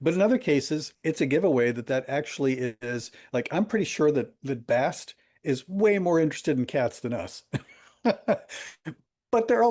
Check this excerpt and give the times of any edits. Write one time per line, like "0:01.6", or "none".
0:00.9